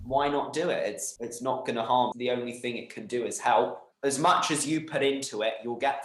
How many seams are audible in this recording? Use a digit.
3